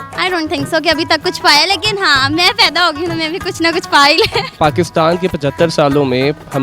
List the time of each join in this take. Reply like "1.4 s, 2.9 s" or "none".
none